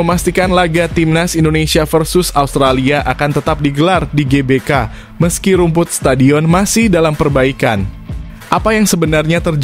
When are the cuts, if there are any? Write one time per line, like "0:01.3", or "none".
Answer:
none